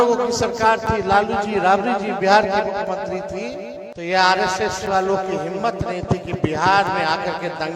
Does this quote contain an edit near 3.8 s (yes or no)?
yes